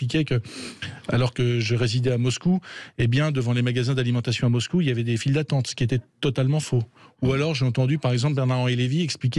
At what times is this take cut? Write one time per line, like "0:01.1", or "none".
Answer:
none